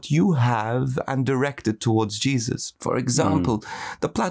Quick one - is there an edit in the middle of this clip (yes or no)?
yes